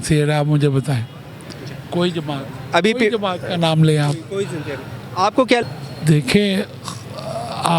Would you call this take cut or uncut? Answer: cut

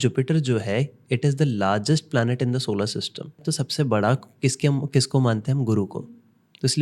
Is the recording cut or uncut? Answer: cut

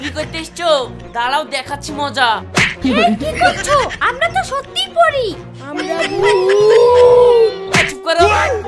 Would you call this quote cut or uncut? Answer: uncut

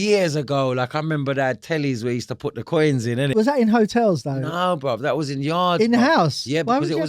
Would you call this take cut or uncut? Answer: cut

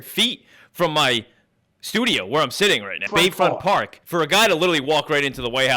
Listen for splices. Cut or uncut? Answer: cut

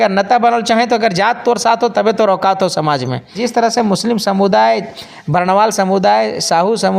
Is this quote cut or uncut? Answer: cut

